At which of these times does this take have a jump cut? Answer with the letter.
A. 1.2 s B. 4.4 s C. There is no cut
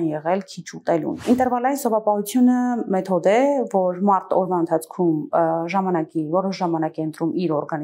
A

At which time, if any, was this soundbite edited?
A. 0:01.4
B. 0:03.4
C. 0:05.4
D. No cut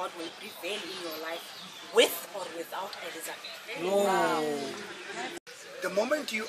C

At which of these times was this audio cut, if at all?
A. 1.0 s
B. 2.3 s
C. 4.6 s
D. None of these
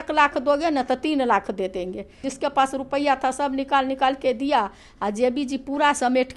B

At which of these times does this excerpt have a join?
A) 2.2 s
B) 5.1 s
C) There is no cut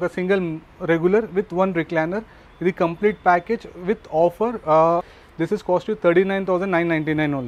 B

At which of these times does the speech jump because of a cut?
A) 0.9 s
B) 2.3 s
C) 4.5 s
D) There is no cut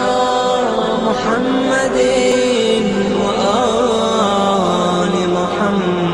B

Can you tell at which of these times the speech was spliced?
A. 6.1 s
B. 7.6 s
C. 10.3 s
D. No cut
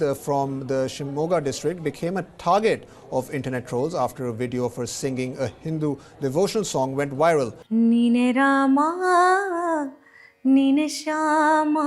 B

